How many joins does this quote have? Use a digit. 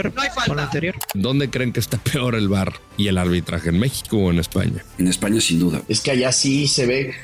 3